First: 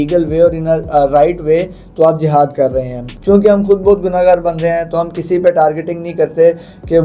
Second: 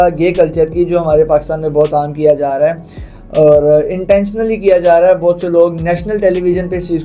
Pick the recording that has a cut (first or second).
first